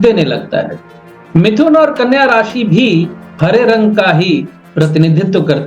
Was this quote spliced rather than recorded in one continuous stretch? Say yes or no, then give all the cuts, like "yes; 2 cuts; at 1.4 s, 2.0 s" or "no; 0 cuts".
no; 0 cuts